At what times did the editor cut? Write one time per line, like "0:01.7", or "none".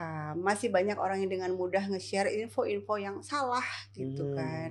none